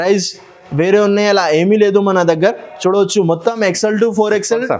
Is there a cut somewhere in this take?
no; 0 cuts

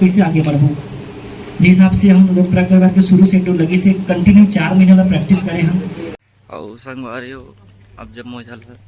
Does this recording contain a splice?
yes; 1 cut; at 6.1 s

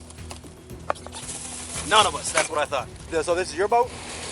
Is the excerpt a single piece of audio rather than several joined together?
no; 1 cut; at 3.0 s

